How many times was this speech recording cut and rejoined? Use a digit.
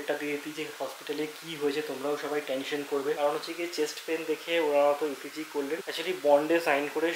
2